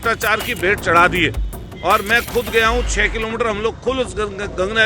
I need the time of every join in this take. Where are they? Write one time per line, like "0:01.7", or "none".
none